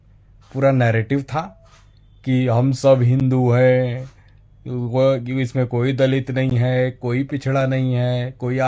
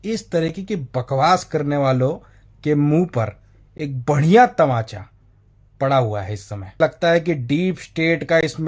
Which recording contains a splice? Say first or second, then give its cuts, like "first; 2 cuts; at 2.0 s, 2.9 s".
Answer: second; 1 cut; at 6.8 s